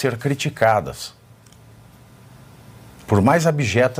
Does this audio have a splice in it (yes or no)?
no